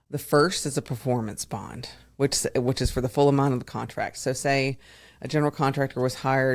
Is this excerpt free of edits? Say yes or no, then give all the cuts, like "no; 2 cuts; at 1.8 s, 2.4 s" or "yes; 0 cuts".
yes; 0 cuts